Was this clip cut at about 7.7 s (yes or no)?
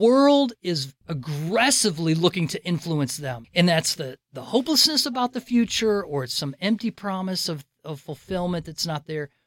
no